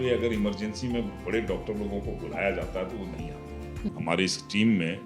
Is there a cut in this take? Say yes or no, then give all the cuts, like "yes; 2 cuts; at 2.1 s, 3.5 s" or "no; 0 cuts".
yes; 1 cut; at 3.9 s